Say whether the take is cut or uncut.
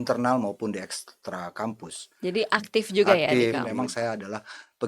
cut